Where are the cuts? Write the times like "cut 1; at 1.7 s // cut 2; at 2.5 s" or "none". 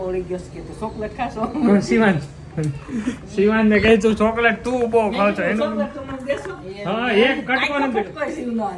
none